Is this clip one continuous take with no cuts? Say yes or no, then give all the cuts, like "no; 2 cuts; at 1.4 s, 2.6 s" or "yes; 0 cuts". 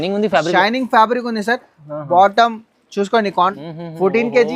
no; 1 cut; at 3.5 s